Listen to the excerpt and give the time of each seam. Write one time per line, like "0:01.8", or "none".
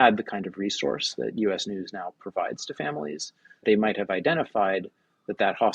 0:03.6